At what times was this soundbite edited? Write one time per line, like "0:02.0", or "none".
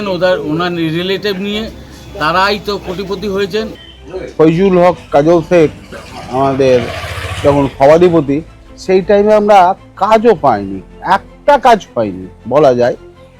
0:03.8